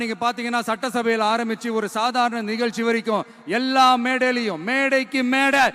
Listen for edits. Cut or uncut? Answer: uncut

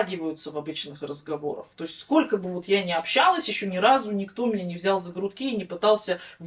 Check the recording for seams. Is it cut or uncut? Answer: uncut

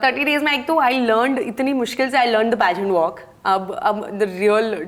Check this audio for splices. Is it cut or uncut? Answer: uncut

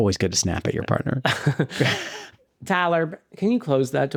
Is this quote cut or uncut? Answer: uncut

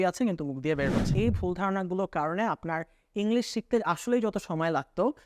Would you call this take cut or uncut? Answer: cut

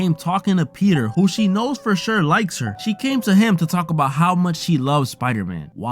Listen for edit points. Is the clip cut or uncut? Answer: cut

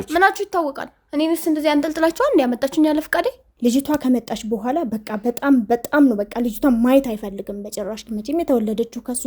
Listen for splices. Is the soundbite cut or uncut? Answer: cut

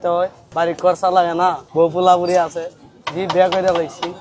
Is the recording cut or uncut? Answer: uncut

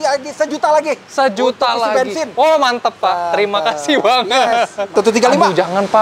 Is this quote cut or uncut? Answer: cut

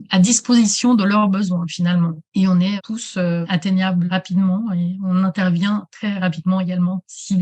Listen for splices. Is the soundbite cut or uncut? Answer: cut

